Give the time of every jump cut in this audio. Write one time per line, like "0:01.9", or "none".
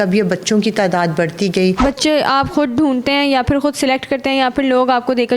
0:01.8